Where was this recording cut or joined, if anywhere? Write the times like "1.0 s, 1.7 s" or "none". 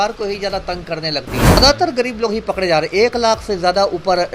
1.6 s